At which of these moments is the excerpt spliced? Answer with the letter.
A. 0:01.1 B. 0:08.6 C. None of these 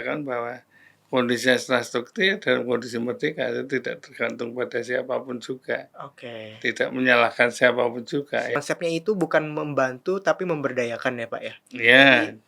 B